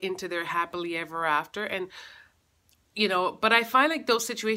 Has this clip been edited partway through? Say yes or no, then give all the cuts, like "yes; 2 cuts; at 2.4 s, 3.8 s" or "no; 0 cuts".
no; 0 cuts